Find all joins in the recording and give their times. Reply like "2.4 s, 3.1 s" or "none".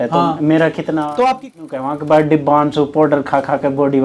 1.5 s

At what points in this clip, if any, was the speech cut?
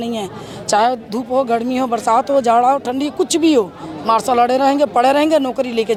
none

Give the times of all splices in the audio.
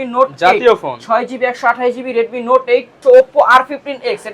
3.0 s

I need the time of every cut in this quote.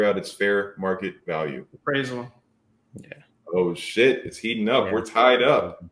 none

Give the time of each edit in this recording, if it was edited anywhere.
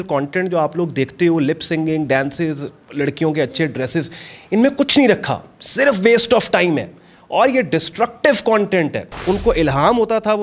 9.1 s

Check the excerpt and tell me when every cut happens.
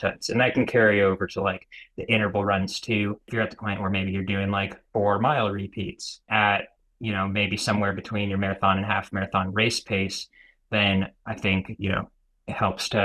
3.3 s, 6.2 s

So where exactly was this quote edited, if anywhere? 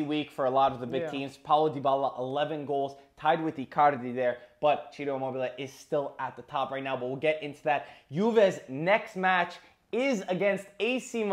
none

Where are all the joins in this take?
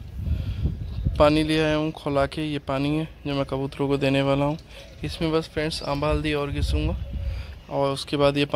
none

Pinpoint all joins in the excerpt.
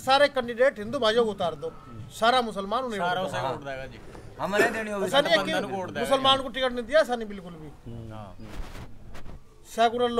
none

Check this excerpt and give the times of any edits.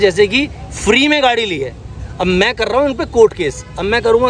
none

